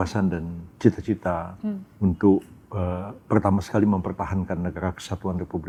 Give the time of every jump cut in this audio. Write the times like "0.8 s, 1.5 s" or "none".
none